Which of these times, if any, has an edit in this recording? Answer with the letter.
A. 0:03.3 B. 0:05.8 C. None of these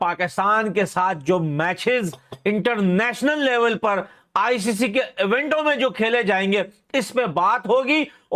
C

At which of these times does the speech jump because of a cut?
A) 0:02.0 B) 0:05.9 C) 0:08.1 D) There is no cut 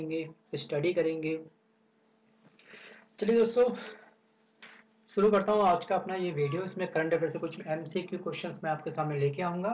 C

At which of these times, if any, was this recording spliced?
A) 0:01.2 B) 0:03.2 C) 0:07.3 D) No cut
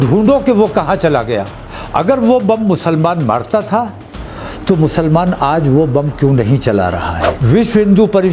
C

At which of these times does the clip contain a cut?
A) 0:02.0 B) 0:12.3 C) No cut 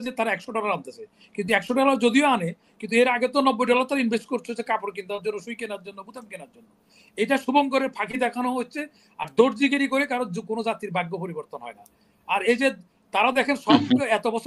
C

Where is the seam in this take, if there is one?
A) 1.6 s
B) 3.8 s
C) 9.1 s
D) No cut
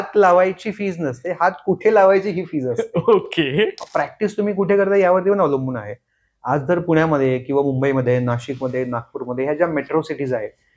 B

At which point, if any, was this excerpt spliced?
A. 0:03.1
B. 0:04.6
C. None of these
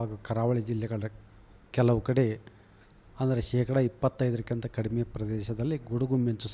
C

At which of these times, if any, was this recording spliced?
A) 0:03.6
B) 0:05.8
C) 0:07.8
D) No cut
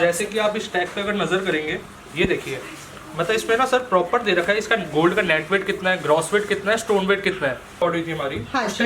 C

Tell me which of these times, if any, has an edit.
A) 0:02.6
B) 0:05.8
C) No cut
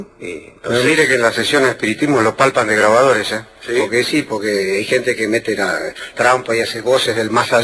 A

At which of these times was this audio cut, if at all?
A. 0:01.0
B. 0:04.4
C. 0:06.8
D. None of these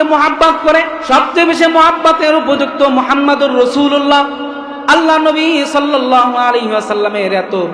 A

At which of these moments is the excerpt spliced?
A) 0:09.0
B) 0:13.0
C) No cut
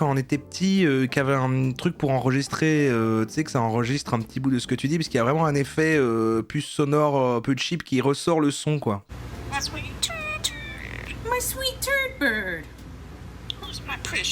A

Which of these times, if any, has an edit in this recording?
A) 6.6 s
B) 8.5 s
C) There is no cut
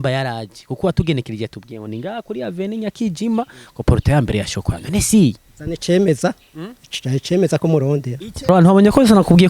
B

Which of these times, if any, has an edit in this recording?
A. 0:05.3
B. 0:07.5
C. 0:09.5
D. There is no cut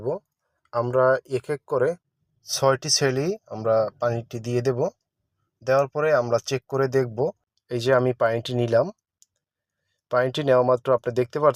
B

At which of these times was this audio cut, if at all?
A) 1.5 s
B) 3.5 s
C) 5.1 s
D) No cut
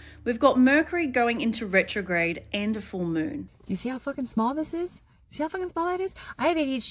B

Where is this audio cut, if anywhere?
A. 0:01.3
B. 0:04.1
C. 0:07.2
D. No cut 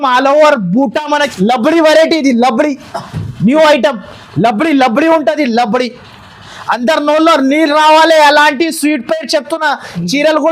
A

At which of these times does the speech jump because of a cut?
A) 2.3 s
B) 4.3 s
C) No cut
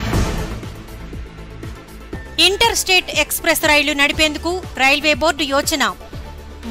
A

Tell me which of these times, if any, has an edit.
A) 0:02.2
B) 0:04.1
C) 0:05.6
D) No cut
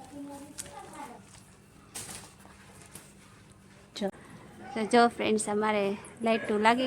B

